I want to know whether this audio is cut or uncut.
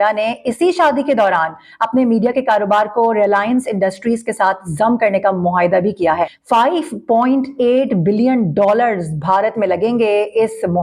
cut